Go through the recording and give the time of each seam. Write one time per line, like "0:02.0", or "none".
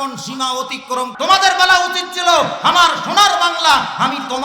0:01.1